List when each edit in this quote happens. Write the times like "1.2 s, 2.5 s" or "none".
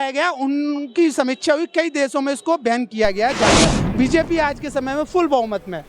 3.5 s